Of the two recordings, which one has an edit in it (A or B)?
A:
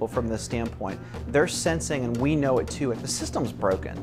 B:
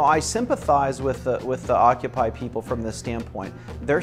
A